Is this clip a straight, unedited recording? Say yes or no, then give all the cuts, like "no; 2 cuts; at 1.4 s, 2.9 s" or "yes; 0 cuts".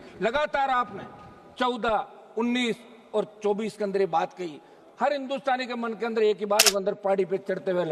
no; 1 cut; at 6.7 s